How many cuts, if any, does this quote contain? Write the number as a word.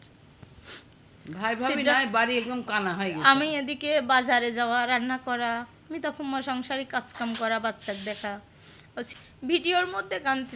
one